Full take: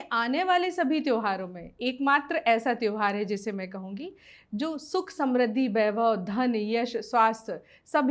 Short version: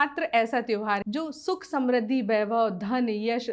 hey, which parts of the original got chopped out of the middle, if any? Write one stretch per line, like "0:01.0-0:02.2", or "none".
0:03.1-0:04.5